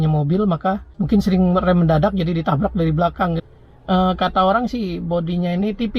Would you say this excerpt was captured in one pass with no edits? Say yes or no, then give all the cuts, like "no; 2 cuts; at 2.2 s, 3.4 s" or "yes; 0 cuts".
yes; 0 cuts